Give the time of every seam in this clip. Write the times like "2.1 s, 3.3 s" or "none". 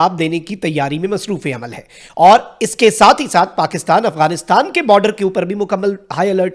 none